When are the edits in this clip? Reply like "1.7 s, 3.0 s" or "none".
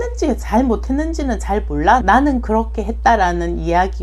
2.0 s